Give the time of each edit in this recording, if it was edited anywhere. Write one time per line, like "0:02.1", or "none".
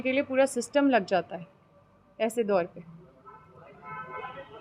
none